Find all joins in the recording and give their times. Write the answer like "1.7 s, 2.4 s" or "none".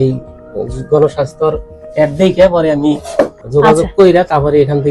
3.4 s